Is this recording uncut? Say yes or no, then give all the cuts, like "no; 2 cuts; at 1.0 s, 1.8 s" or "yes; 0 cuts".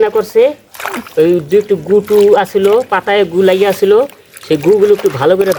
yes; 0 cuts